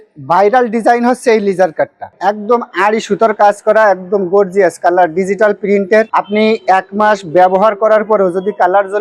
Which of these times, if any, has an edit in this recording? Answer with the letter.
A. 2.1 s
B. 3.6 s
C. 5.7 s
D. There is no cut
A